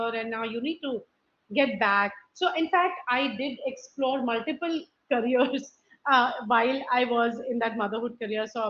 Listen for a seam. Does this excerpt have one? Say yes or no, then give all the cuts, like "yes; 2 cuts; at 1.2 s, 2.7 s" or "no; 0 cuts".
no; 0 cuts